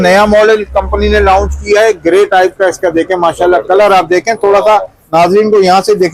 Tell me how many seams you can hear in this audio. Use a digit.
0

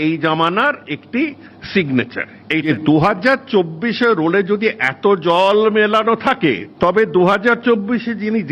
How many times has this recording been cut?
2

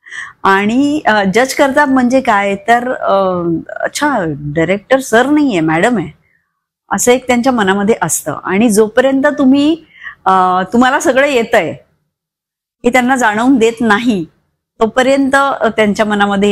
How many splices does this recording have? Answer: 0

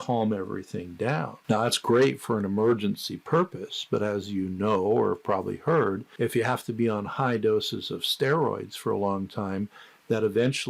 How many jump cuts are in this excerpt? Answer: 1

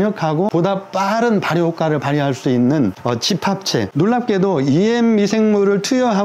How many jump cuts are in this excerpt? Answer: 1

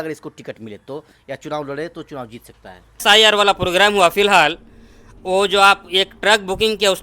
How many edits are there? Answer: 1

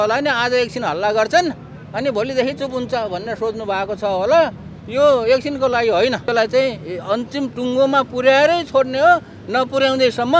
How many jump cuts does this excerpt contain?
1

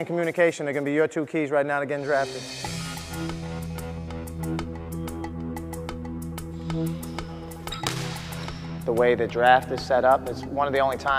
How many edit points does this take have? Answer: 0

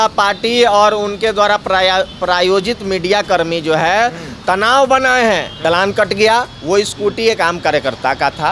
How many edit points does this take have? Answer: 1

